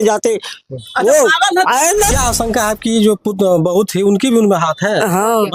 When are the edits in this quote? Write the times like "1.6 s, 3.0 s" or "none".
2.1 s